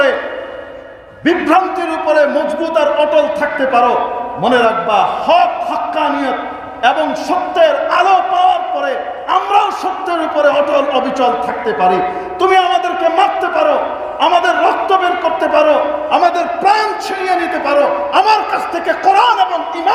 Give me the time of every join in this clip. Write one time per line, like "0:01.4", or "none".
none